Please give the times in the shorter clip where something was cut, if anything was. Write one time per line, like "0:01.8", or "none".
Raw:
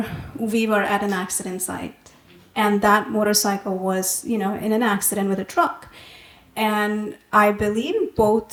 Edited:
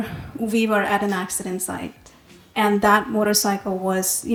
none